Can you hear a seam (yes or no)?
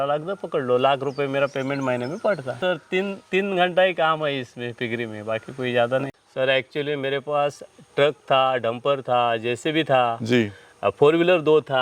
yes